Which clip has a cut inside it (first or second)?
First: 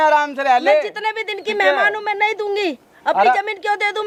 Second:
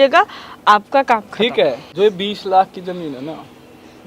second